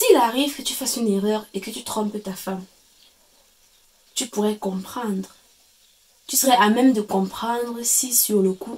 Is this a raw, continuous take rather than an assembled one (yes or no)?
yes